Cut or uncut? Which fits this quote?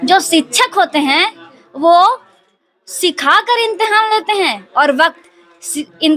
uncut